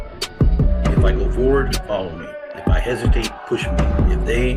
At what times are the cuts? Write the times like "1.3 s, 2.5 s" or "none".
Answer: none